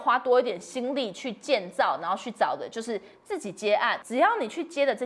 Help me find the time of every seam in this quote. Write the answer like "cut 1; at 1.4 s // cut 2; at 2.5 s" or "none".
cut 1; at 4.0 s